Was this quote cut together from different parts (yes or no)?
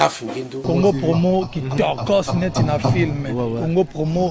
no